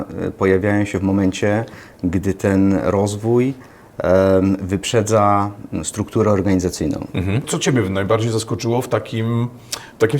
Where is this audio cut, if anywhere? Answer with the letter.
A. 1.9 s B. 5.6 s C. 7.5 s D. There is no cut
C